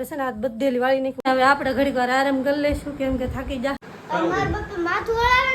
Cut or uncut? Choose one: cut